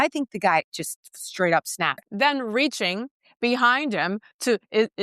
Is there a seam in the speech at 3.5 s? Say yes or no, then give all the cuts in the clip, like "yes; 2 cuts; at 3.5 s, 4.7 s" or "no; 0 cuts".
no; 1 cut; at 2.1 s